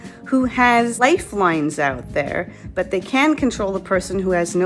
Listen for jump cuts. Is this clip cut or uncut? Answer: cut